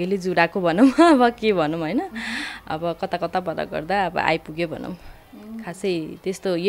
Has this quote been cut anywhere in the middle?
no; 0 cuts

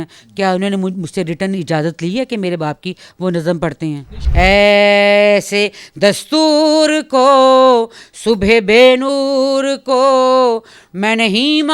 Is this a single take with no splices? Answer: no; 1 cut; at 4.2 s

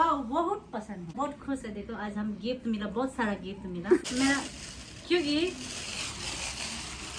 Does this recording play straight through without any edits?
no; 2 cuts; at 1.1 s, 4.0 s

